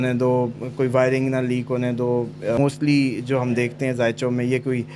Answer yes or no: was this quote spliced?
yes